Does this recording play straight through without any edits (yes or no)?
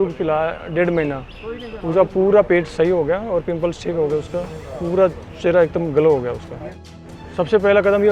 no